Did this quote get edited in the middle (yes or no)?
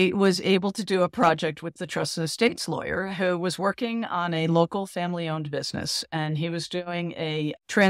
no